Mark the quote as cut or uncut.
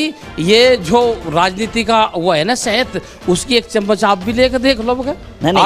uncut